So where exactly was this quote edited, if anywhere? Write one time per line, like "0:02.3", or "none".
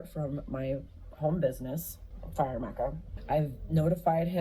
0:03.1